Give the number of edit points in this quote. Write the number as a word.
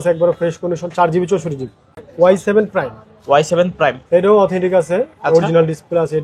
one